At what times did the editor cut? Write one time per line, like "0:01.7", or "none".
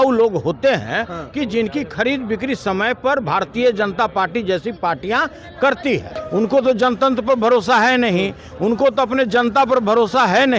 0:06.1